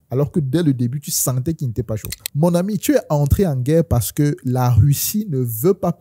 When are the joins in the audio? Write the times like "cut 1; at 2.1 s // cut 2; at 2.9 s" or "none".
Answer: cut 1; at 2.1 s